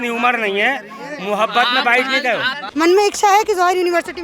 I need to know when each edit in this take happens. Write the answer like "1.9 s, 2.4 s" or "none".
2.6 s